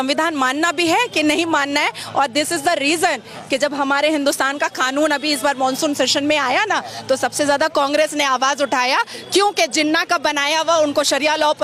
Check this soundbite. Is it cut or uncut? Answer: uncut